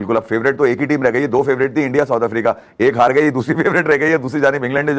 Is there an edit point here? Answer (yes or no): no